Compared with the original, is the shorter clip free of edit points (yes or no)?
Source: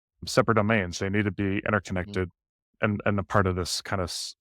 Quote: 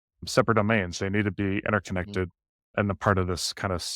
no